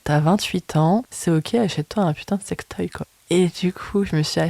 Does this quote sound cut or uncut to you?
cut